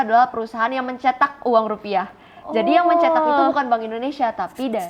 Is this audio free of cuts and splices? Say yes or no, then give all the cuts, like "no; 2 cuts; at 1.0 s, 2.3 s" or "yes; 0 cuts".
yes; 0 cuts